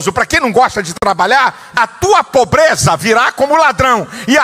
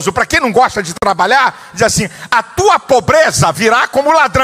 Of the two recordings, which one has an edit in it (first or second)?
first